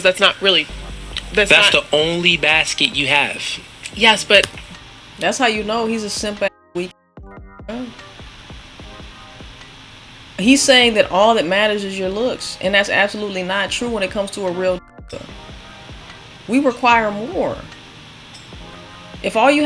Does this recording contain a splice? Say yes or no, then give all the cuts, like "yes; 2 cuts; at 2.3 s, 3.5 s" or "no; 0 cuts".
no; 0 cuts